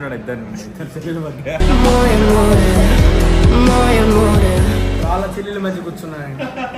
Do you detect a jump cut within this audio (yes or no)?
no